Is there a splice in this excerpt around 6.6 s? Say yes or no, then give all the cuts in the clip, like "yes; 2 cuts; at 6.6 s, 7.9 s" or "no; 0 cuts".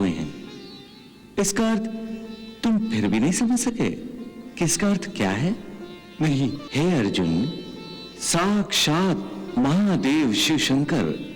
yes; 1 cut; at 6.6 s